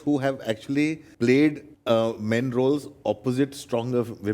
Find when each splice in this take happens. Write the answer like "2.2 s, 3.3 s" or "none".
1.1 s, 1.7 s